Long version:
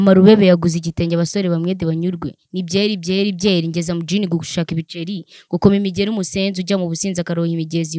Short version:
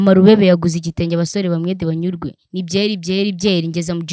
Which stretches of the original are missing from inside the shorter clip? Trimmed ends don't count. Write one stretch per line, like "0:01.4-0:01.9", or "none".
none